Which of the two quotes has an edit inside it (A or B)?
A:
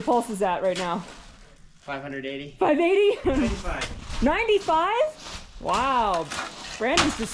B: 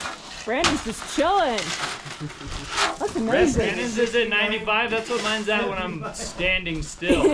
A